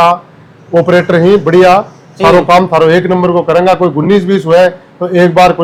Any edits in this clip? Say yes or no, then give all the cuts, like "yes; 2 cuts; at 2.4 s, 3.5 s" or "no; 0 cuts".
no; 0 cuts